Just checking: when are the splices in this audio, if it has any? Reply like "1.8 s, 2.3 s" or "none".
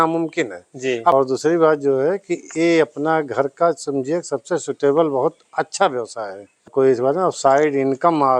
1.1 s, 6.7 s